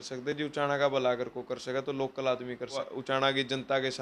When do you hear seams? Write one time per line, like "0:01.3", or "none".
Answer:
0:02.7